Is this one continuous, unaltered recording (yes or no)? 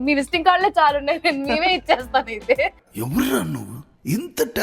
no